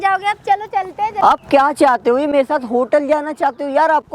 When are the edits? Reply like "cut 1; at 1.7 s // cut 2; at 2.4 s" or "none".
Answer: cut 1; at 1.2 s